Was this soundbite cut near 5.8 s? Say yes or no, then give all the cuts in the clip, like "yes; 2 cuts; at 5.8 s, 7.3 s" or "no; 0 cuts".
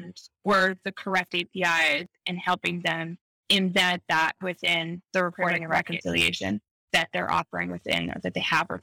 yes; 2 cuts; at 5.8 s, 6.9 s